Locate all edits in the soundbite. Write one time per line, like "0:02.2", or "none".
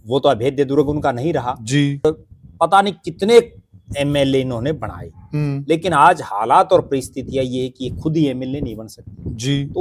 0:02.0